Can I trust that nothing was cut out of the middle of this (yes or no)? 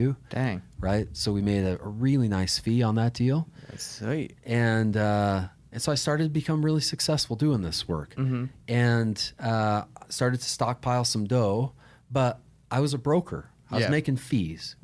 yes